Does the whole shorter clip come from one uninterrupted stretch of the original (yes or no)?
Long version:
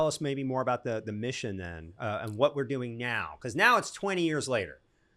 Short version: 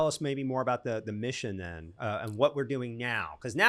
yes